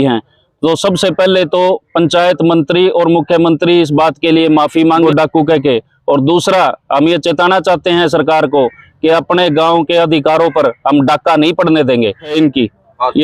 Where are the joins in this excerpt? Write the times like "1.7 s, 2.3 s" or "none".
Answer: 5.0 s, 12.3 s